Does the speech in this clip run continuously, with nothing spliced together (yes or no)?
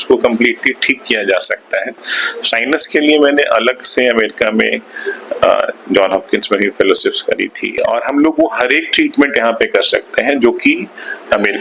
no